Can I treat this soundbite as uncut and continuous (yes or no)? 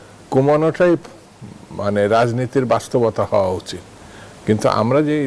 yes